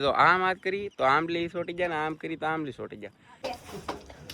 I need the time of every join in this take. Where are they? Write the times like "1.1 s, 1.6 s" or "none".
3.3 s